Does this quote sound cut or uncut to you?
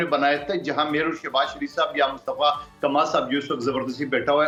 uncut